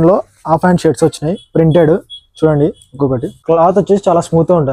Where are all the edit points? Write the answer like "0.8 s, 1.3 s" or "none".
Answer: none